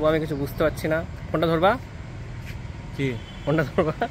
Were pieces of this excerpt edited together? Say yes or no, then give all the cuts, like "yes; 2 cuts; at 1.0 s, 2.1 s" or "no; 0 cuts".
no; 0 cuts